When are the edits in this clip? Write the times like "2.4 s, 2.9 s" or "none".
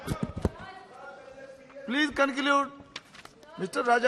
none